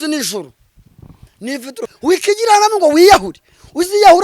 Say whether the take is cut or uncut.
cut